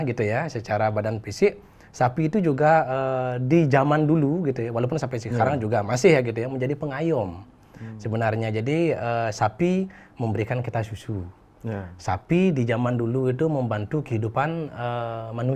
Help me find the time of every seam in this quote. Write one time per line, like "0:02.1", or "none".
none